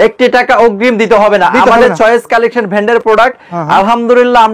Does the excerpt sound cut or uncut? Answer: uncut